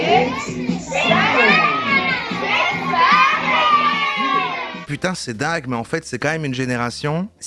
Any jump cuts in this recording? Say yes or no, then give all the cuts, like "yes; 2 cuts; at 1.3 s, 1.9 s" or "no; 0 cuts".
yes; 1 cut; at 4.9 s